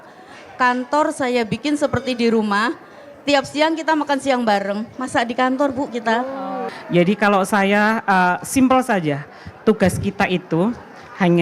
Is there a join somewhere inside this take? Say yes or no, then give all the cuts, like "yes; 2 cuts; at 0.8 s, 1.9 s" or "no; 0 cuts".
yes; 1 cut; at 6.6 s